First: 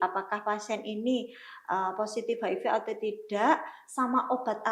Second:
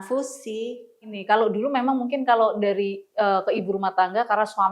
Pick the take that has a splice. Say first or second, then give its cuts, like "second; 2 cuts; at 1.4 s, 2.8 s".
second; 1 cut; at 1.1 s